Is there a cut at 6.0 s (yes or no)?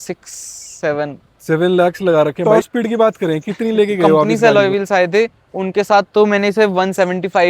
no